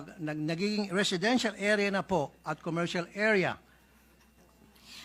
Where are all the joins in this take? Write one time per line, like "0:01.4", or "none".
none